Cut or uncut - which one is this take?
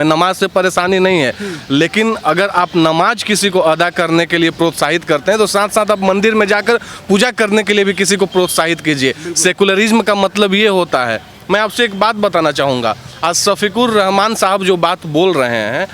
uncut